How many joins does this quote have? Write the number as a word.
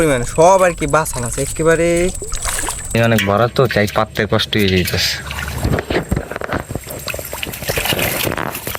one